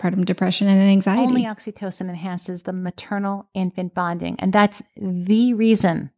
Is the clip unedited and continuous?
no; 1 cut; at 1.3 s

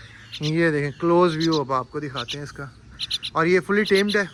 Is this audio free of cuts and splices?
yes; 0 cuts

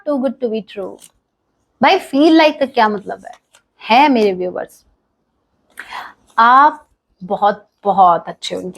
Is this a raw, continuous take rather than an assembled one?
yes; 0 cuts

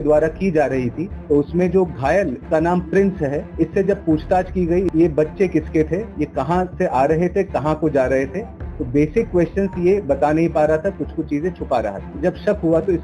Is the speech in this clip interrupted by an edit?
yes; 6 cuts; at 1.1 s, 2.4 s, 3.5 s, 4.9 s, 6.2 s, 12.1 s

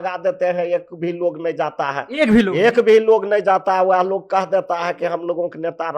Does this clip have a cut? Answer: no; 0 cuts

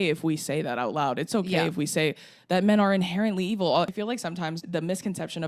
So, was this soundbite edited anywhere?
yes; 1 cut; at 3.9 s

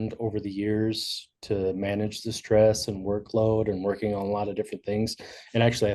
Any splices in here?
no; 0 cuts

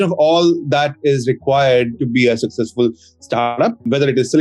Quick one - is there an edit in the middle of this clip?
no; 0 cuts

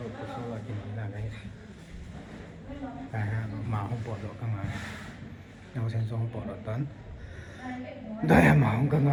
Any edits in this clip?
no; 0 cuts

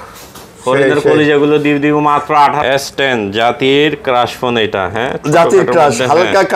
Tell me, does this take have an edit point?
yes; 1 cut; at 2.6 s

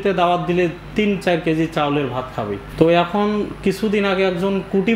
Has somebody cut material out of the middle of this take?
yes; 1 cut; at 2.7 s

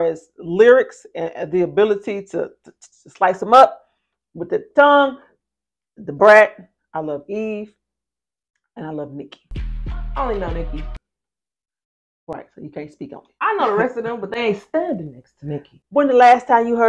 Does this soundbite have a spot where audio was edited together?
no; 0 cuts

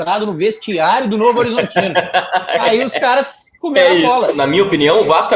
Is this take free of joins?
no; 1 cut; at 4.3 s

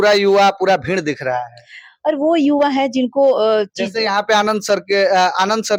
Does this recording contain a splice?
no; 0 cuts

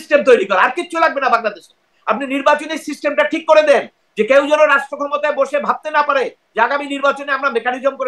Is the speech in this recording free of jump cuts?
yes; 0 cuts

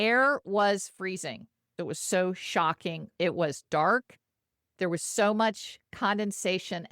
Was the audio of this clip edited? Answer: yes; 2 cuts; at 1.6 s, 3.1 s

